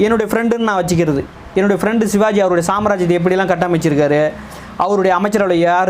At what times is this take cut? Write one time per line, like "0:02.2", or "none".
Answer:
none